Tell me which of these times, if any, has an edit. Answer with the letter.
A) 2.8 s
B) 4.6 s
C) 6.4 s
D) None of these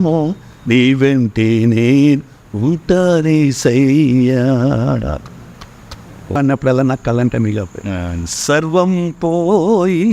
C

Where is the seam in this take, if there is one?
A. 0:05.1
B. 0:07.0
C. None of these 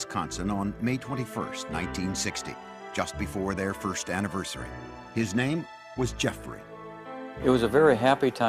B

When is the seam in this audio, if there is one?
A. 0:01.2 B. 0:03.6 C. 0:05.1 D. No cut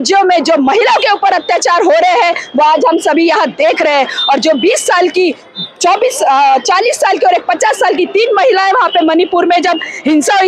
D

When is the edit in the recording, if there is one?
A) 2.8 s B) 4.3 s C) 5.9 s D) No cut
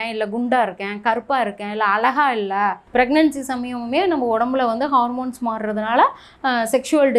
A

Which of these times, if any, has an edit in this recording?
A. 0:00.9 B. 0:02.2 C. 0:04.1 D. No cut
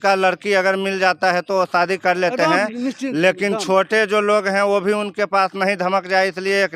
D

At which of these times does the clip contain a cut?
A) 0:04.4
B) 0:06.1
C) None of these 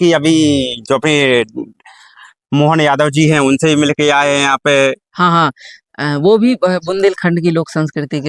C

